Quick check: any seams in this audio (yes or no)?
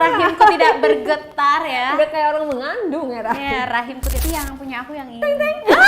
yes